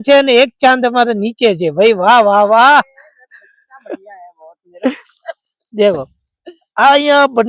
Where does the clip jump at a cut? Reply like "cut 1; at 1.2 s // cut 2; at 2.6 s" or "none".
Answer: none